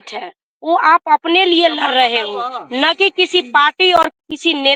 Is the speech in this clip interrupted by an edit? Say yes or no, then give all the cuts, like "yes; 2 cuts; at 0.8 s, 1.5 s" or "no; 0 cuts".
no; 0 cuts